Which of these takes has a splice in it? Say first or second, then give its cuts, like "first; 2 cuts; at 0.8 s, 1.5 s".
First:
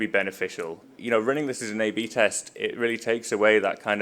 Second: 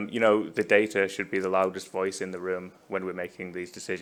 first; 1 cut; at 0.9 s